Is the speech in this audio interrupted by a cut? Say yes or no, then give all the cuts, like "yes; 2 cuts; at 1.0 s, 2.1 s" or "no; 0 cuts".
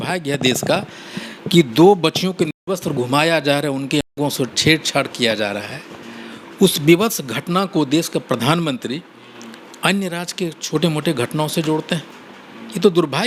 no; 0 cuts